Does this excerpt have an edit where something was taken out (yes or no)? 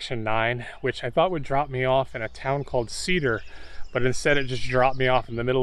no